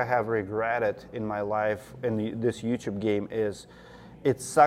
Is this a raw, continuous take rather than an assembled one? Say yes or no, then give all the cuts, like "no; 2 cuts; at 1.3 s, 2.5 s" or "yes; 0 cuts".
yes; 0 cuts